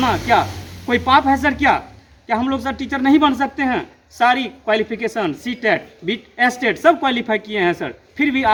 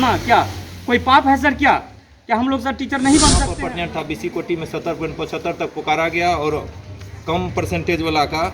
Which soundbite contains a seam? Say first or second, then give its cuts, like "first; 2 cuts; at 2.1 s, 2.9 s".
second; 1 cut; at 3.5 s